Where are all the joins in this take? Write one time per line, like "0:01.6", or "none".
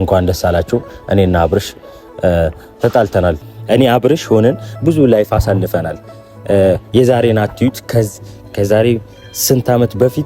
0:03.4